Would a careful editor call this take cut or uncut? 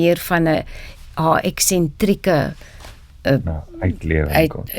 uncut